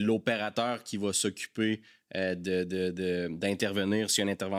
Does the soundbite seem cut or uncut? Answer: uncut